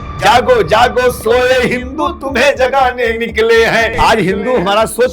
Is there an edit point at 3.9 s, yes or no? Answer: yes